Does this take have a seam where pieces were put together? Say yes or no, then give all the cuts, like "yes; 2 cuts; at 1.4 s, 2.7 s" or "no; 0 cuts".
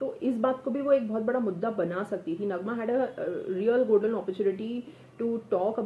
no; 0 cuts